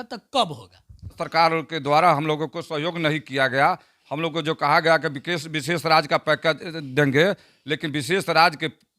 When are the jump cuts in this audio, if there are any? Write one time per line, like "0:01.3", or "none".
0:01.2